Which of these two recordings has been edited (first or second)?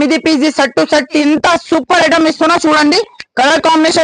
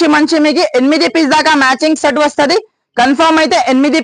first